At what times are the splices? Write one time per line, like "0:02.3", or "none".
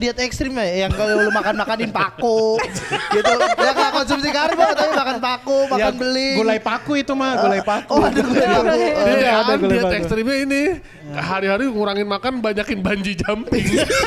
none